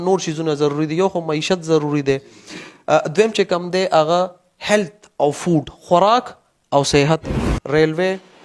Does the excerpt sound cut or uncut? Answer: cut